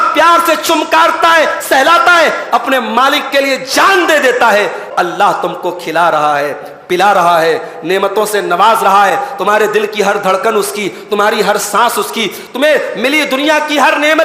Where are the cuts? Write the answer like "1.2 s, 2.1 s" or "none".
4.8 s